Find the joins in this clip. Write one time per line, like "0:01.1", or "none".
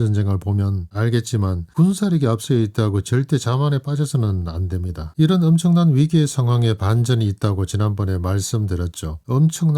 0:05.0